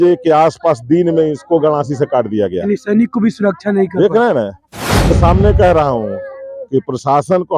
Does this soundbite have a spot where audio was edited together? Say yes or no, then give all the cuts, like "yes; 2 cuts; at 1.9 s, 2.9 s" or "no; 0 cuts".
yes; 1 cut; at 5.2 s